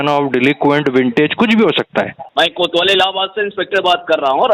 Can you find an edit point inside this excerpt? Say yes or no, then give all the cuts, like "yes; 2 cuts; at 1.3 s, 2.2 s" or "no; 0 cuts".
yes; 1 cut; at 2.2 s